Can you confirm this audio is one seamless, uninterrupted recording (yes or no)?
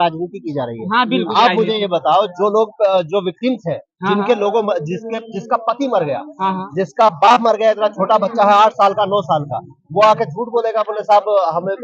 yes